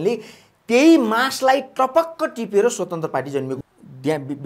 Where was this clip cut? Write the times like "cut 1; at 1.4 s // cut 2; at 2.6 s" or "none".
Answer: cut 1; at 3.6 s